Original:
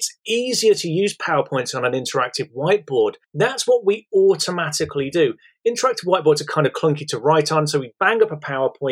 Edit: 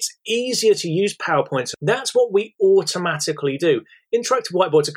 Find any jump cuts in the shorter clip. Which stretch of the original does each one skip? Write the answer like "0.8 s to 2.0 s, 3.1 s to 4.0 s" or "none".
1.7 s to 3.2 s